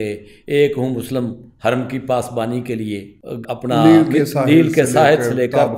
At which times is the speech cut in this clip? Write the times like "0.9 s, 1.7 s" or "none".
3.5 s